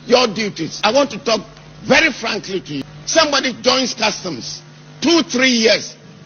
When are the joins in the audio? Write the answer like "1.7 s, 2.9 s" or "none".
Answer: 0.8 s, 2.8 s